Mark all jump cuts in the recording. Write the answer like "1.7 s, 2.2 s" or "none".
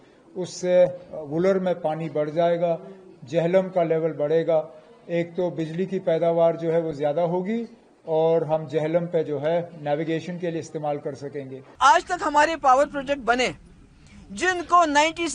11.8 s